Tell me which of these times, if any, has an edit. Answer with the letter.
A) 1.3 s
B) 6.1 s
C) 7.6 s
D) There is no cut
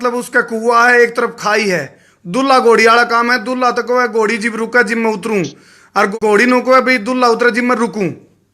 B